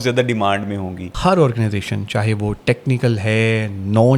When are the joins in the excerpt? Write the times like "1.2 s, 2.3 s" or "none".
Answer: 1.1 s